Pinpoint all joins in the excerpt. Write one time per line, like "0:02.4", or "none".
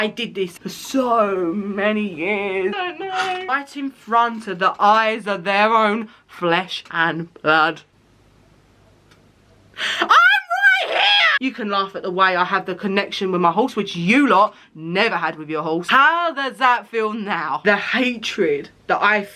0:03.4
0:11.3
0:17.6